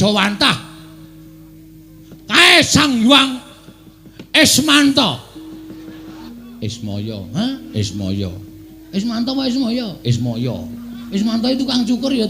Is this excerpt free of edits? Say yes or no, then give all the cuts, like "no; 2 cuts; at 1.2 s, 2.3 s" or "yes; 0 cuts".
no; 2 cuts; at 6.3 s, 11.0 s